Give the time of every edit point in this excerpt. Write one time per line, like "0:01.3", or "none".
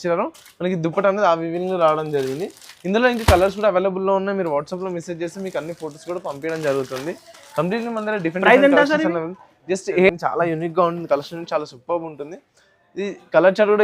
0:10.1